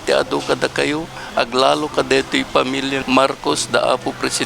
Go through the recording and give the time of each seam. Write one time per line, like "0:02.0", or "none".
0:03.0